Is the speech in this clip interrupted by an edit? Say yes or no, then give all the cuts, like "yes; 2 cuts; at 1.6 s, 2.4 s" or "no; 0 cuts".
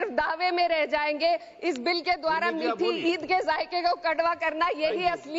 no; 0 cuts